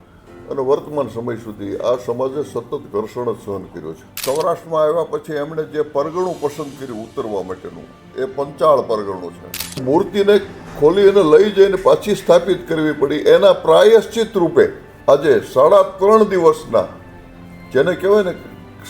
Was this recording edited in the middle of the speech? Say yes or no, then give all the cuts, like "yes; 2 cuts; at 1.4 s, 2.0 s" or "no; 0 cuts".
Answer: yes; 3 cuts; at 4.1 s, 9.8 s, 14.9 s